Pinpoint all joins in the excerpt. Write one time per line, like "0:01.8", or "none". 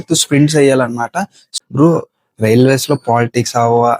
0:01.4